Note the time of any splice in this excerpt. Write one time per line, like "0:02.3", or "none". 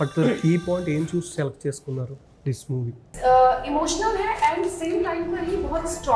0:03.0